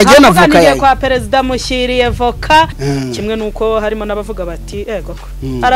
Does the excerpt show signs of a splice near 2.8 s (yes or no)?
yes